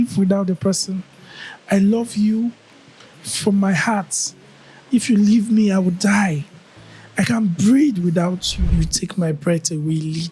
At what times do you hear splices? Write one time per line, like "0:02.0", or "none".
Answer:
0:08.7